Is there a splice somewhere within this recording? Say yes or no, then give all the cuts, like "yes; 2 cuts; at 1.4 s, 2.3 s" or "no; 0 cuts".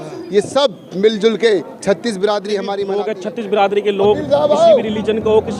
yes; 1 cut; at 2.8 s